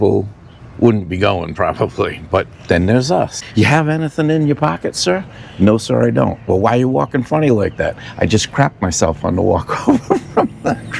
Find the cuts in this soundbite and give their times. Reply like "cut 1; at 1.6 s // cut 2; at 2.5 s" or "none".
cut 1; at 3.4 s